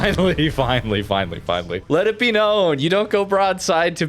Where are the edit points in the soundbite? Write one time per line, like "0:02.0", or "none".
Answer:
0:01.8